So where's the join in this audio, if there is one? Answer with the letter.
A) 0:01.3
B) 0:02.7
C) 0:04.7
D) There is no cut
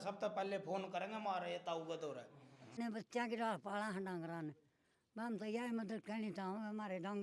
B